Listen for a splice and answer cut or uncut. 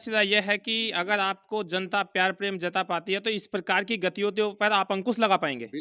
uncut